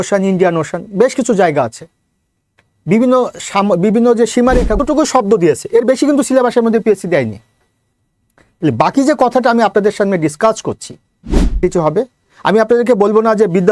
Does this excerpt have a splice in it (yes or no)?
yes